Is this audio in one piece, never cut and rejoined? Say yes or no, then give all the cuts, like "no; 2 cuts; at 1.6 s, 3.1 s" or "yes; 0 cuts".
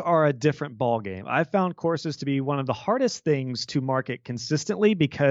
yes; 0 cuts